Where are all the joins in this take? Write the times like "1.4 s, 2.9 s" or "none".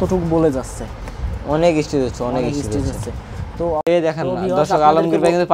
3.7 s